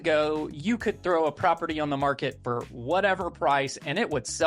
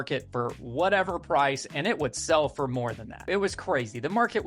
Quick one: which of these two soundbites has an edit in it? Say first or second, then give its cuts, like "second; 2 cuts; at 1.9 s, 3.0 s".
second; 1 cut; at 3.3 s